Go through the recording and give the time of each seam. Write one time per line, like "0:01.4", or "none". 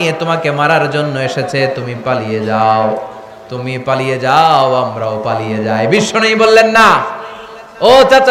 none